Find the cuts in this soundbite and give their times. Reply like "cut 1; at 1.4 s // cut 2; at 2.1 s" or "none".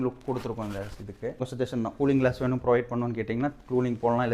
cut 1; at 1.5 s